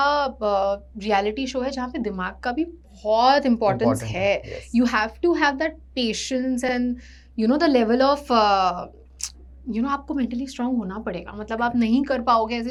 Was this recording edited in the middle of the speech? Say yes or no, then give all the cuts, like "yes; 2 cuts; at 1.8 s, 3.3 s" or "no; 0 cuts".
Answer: no; 0 cuts